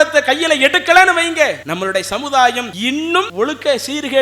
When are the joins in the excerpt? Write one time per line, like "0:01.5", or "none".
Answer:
0:01.6
0:02.9

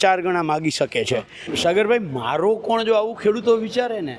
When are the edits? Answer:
0:01.5

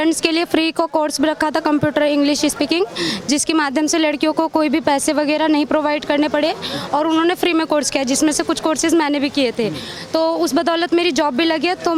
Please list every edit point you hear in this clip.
none

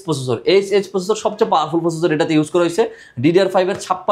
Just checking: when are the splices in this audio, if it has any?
none

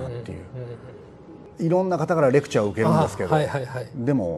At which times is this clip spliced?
0:01.4

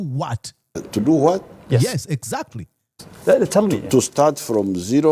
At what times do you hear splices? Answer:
none

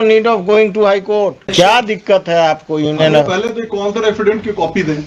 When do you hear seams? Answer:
0:01.5

